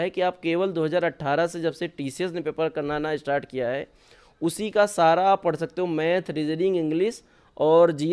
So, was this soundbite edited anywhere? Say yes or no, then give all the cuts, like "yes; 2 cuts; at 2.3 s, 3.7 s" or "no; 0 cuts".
no; 0 cuts